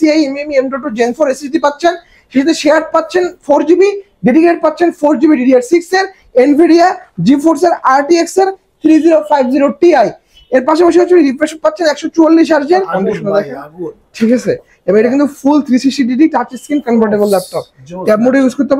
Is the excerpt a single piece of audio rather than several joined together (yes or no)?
no